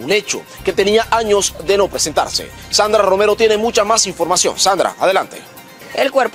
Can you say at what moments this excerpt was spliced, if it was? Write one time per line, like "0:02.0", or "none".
none